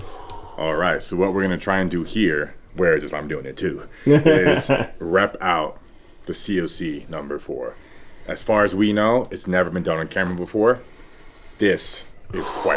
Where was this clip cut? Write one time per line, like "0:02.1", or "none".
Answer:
none